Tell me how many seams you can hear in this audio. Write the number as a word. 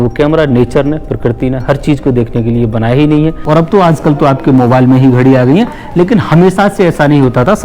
one